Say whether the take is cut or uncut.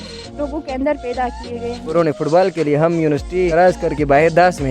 cut